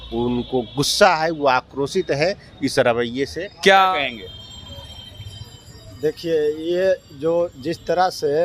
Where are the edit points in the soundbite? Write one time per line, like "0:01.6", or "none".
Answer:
0:03.9